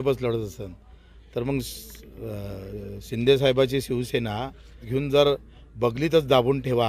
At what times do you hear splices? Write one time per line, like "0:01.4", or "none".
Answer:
0:04.9